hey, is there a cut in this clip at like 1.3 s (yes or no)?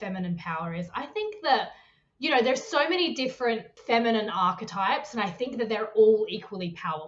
no